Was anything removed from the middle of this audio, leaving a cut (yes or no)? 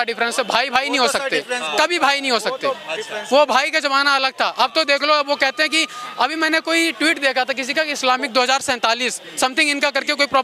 no